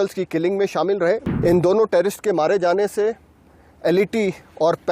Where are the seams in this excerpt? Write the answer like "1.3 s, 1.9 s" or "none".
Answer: 1.3 s